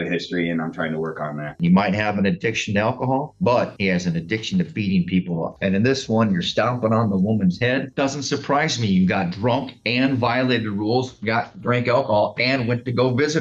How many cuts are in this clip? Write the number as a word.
three